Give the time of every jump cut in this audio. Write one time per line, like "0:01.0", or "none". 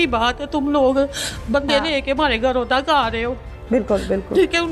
none